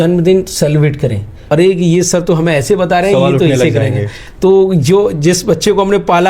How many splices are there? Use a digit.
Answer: 1